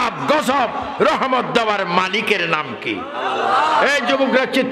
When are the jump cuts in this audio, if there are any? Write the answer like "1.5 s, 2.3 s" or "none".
none